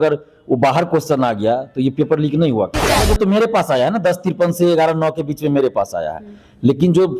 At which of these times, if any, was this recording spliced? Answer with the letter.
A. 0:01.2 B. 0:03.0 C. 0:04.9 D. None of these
B